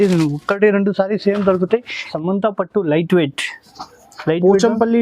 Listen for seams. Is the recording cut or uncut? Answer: cut